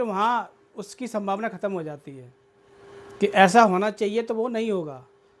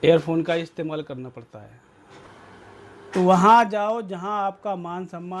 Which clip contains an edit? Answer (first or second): second